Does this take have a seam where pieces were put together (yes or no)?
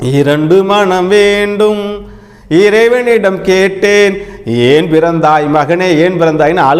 no